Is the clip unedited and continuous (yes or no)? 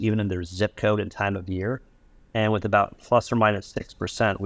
yes